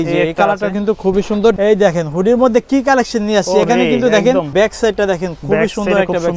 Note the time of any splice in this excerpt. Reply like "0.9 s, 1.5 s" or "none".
1.6 s, 4.5 s